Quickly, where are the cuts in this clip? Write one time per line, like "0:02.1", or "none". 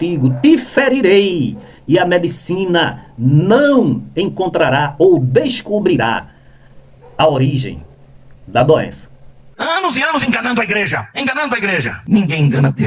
0:09.5